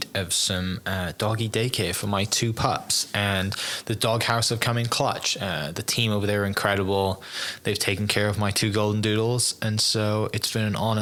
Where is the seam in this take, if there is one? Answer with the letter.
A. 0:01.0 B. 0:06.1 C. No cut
C